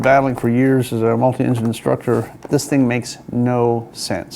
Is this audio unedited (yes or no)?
no